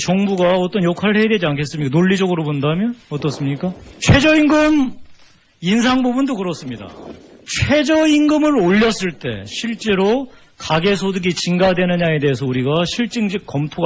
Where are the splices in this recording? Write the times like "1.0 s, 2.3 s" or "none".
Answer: none